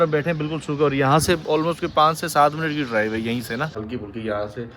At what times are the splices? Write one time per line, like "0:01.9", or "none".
0:03.8